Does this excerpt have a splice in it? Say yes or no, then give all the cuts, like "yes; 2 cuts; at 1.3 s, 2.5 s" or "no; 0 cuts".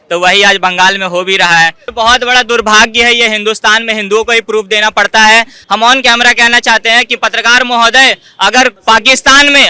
yes; 3 cuts; at 1.8 s, 5.6 s, 8.8 s